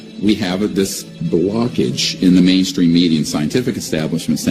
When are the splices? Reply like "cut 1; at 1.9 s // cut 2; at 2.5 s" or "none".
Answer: none